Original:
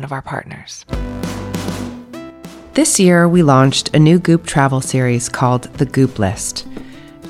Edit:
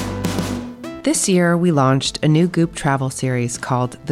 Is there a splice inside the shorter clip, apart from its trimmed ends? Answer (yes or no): yes